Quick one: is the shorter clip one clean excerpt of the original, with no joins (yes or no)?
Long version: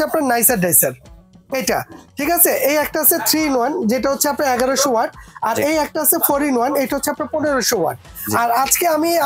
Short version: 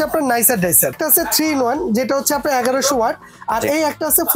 no